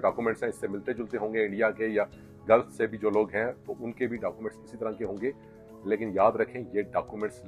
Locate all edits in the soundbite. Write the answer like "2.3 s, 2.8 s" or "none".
none